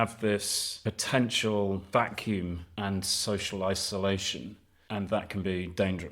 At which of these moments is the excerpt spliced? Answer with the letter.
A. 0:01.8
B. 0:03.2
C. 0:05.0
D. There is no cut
A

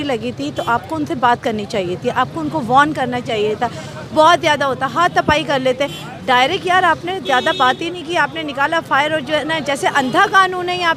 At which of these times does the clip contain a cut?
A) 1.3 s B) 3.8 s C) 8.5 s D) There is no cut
D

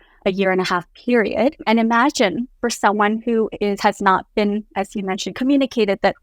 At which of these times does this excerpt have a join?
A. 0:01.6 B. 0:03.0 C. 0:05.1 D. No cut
A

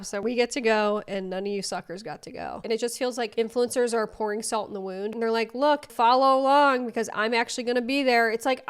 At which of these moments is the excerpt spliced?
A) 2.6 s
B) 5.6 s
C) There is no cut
A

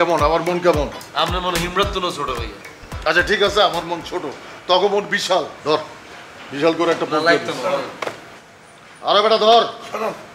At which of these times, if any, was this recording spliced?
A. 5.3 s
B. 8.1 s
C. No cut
C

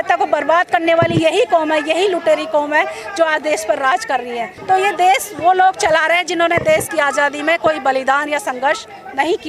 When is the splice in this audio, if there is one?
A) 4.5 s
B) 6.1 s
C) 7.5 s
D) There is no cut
A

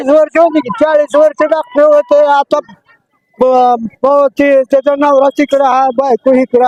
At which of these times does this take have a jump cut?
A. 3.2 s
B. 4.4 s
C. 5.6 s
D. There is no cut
D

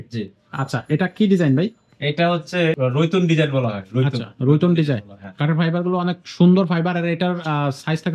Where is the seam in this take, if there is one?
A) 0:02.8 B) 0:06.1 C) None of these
A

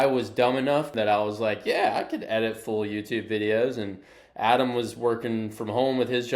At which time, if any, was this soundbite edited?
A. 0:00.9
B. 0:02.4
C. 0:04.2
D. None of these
A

